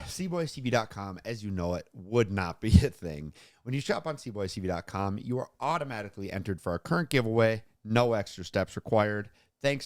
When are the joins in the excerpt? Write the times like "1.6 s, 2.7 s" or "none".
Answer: none